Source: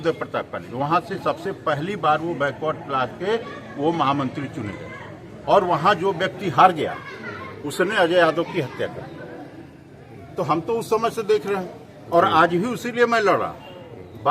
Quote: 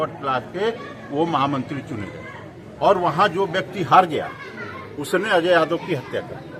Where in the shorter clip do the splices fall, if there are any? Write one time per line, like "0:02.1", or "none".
none